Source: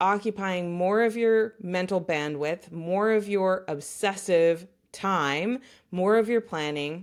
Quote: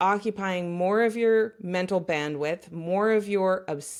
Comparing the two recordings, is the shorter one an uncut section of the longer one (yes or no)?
yes